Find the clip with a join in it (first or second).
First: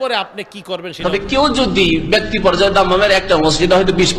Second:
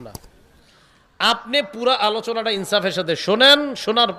first